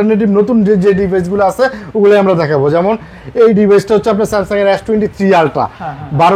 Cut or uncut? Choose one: uncut